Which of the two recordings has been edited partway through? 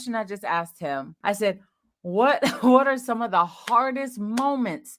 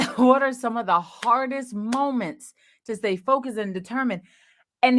first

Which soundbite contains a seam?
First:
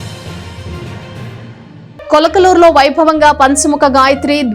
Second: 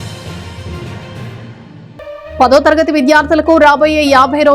first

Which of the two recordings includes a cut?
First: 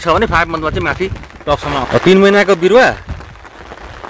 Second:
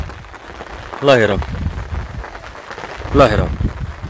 first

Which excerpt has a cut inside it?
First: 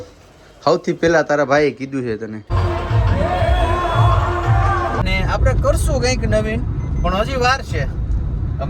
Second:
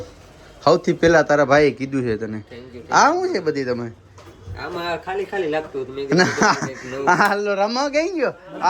first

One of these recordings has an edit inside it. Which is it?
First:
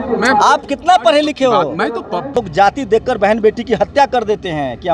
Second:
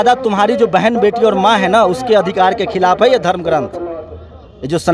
first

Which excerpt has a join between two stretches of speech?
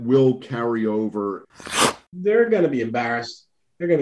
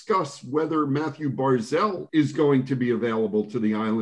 first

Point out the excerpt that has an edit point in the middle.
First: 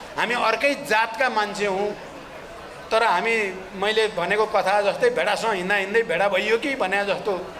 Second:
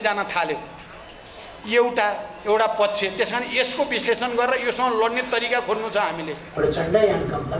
second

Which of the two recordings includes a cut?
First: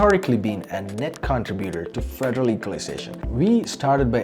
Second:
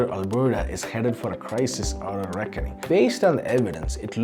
first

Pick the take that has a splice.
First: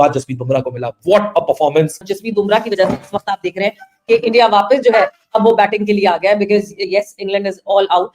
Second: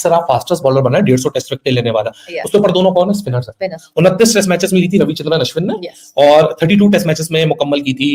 first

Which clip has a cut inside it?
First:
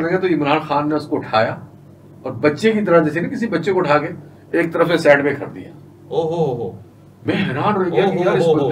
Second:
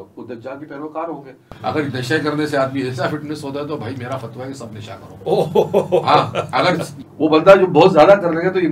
second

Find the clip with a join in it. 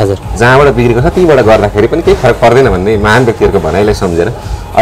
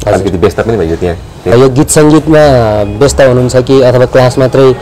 second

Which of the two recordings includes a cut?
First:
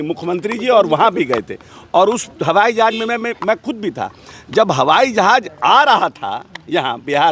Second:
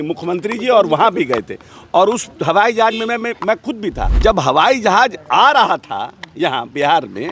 second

